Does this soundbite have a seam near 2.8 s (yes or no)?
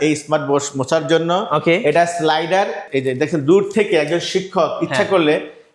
yes